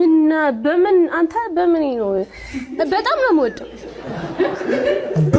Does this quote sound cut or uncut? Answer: uncut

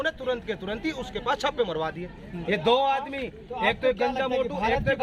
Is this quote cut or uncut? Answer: cut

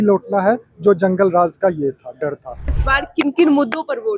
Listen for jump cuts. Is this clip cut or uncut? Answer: cut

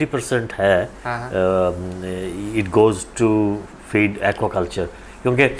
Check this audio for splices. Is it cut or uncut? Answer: uncut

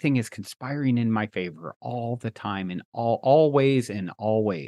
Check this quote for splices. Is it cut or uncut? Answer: uncut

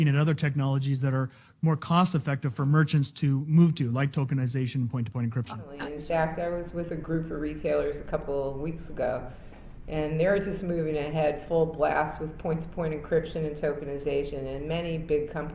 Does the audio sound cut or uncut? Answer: cut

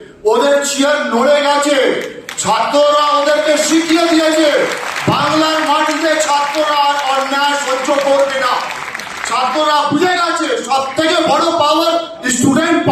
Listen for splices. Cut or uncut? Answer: uncut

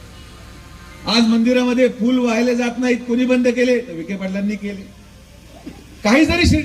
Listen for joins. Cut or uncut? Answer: uncut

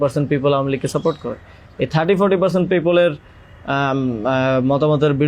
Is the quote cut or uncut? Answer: uncut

